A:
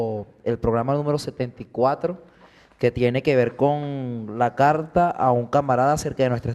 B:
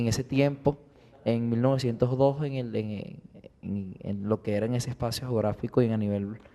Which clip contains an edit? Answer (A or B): B